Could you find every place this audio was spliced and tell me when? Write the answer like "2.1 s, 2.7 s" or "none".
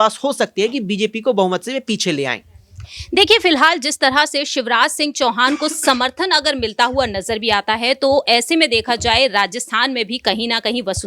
none

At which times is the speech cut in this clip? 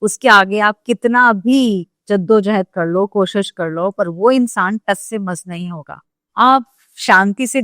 6.2 s

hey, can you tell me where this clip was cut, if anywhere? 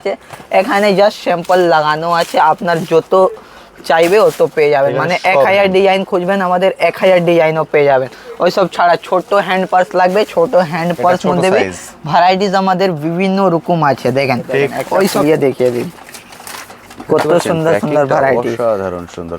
15.2 s

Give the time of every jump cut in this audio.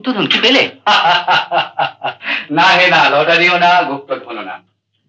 none

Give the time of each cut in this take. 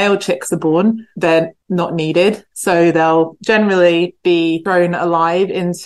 1.1 s, 4.6 s

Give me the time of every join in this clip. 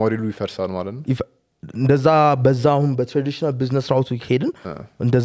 none

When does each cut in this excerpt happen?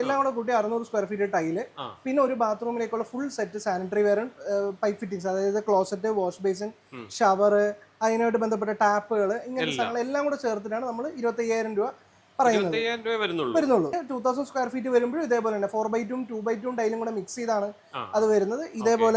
13.9 s

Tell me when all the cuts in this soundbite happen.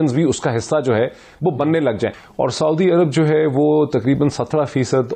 2.2 s

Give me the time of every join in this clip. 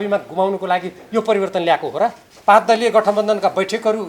2.3 s

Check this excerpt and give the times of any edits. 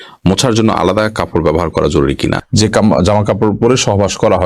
2.4 s

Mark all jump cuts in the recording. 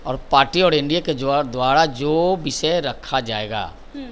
none

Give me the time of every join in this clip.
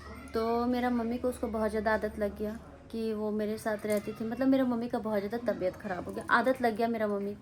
none

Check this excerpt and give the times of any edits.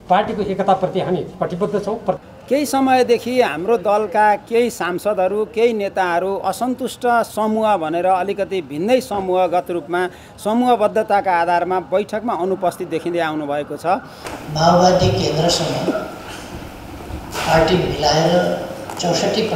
2.2 s, 14.3 s

